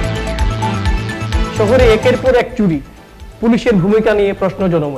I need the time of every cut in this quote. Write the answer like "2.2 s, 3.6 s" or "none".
1.5 s